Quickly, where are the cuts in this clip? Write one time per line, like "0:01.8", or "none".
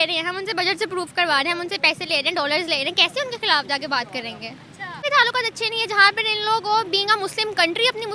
0:05.0